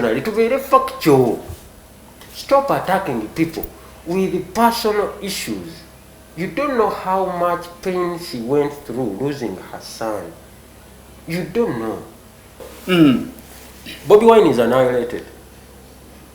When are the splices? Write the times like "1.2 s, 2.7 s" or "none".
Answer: 12.7 s